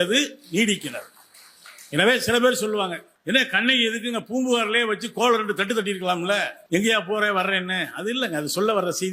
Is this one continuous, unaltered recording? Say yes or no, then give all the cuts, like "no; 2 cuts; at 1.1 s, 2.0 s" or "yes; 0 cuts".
no; 2 cuts; at 3.1 s, 6.5 s